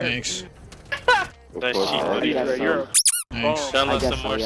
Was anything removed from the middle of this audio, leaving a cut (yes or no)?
yes